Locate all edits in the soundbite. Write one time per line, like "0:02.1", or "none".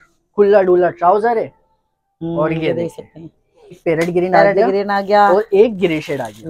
0:03.8